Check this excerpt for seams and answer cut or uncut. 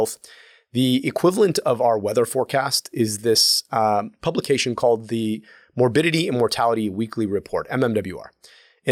uncut